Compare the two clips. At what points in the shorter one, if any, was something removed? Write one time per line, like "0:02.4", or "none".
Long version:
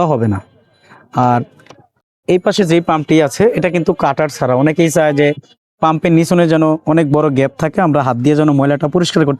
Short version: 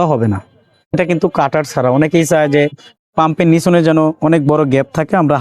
0:00.9